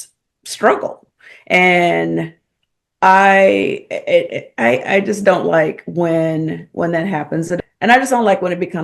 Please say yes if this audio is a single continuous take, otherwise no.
no